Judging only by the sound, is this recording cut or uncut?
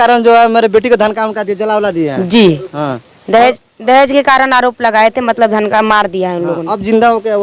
uncut